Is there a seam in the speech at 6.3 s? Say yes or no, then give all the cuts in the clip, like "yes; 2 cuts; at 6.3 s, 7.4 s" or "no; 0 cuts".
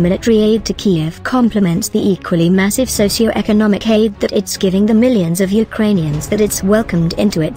no; 1 cut; at 1.4 s